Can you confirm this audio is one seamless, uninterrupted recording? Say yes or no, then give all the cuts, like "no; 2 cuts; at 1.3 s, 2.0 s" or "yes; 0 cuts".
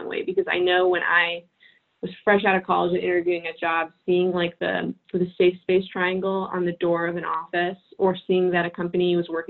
yes; 0 cuts